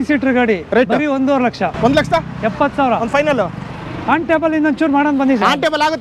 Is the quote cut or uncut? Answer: cut